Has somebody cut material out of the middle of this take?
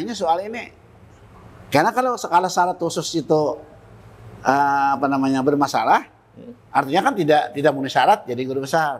no; 0 cuts

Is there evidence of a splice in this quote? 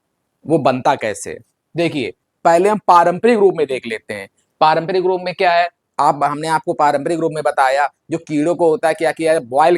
no; 0 cuts

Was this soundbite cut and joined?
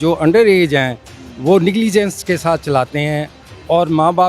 no; 0 cuts

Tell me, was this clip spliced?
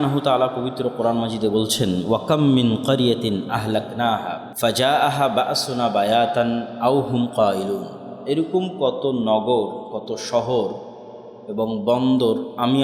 yes; 1 cut; at 4.5 s

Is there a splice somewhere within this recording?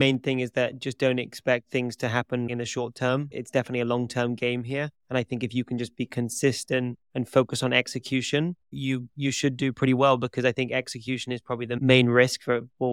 yes; 2 cuts; at 7.0 s, 8.7 s

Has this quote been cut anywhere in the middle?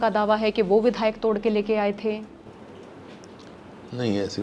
no; 0 cuts

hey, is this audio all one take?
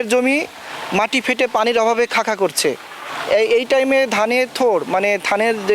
yes; 0 cuts

